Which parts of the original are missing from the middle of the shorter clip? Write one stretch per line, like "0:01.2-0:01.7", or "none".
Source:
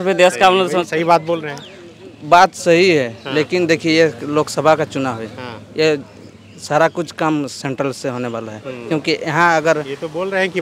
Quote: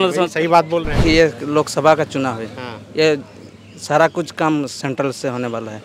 0:01.6-0:03.8

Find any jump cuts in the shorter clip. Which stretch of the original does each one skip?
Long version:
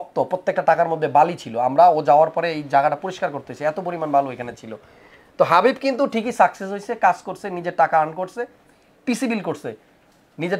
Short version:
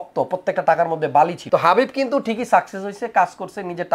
0:01.4-0:05.3

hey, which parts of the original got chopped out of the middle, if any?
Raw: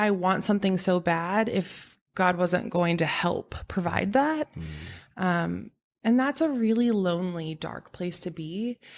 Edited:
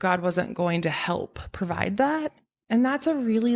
0:04.6-0:05.8

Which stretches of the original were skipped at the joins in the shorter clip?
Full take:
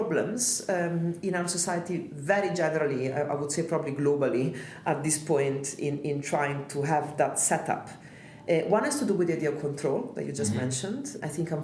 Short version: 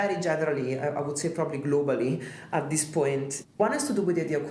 0:05.9-0:08.7

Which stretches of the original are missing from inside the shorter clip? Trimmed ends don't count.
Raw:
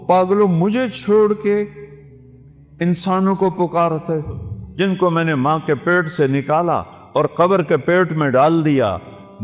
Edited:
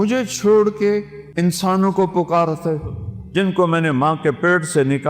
0:01.8-0:02.6

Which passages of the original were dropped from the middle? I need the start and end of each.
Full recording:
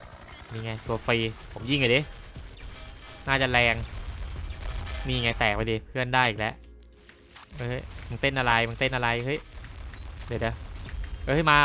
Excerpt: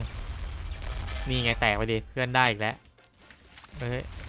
none

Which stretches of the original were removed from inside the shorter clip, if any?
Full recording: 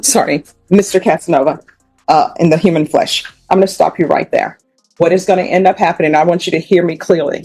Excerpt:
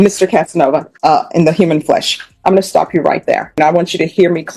0:01.6-0:02.0
0:04.6-0:06.1

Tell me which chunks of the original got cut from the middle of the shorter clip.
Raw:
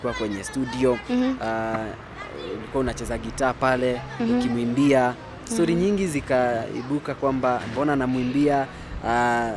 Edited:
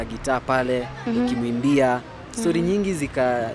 none

